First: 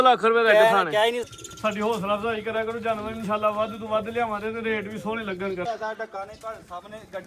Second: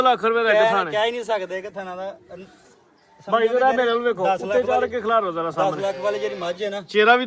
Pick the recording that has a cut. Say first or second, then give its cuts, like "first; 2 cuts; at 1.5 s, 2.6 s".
first; 2 cuts; at 1.2 s, 5.7 s